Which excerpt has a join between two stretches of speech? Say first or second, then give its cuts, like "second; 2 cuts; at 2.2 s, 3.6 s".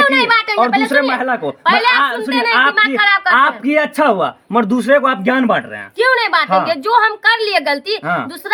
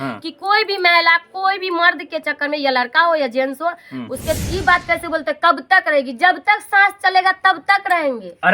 second; 1 cut; at 4.4 s